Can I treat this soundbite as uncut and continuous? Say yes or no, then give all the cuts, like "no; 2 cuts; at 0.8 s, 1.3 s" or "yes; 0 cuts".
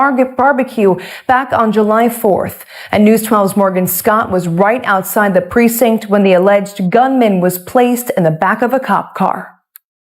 no; 1 cut; at 1.5 s